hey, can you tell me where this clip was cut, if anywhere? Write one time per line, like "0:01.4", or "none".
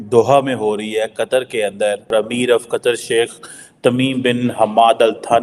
0:02.1

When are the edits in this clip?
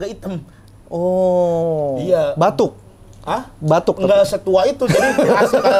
none

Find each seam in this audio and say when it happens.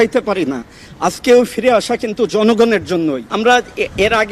0:03.3

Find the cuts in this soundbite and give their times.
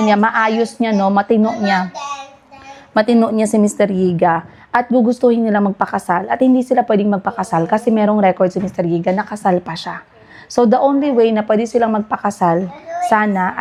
none

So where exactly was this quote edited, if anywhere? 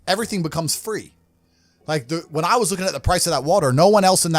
none

